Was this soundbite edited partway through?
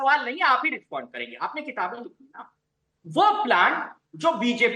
no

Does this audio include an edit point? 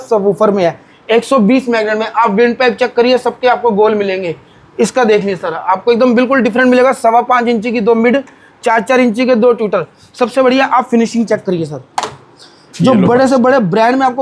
no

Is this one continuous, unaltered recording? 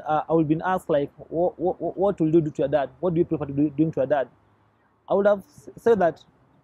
yes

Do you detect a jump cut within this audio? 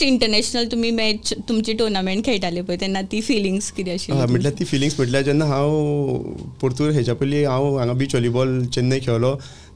no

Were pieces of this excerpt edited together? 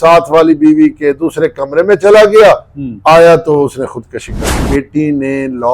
yes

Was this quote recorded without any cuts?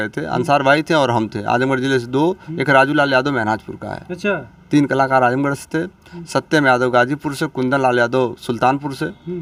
yes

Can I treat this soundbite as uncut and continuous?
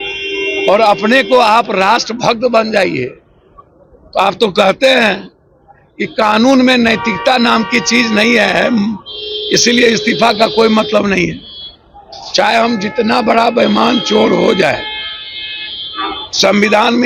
yes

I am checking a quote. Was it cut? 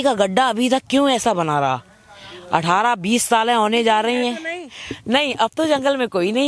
no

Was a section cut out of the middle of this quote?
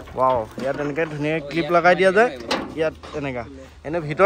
no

